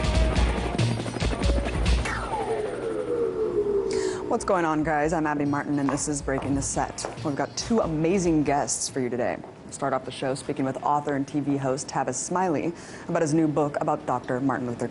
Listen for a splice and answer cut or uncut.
uncut